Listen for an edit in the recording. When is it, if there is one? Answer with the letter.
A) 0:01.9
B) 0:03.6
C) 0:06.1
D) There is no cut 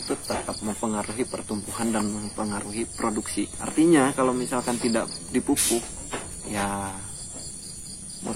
B